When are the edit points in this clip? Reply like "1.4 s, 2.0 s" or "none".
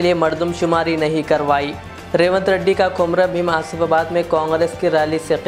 none